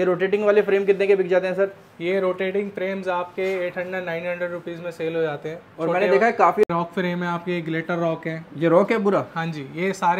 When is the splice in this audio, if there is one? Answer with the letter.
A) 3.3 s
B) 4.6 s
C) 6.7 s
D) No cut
C